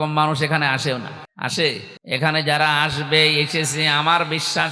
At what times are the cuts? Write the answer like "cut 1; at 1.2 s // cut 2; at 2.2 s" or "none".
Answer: cut 1; at 1.2 s // cut 2; at 1.9 s